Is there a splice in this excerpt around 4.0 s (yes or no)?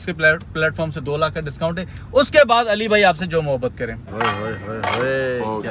yes